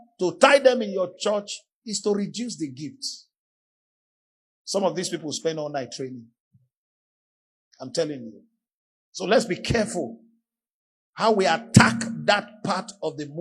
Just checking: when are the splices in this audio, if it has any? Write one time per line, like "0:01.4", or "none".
none